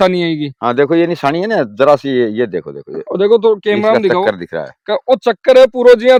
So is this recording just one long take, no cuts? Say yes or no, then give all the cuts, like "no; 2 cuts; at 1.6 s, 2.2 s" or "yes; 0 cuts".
yes; 0 cuts